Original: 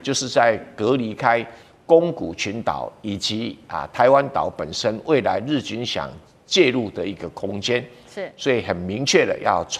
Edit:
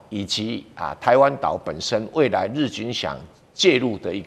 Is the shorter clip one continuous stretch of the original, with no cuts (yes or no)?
yes